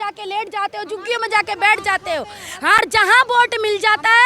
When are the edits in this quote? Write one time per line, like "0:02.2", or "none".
0:02.8